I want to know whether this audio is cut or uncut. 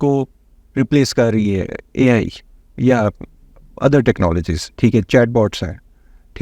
uncut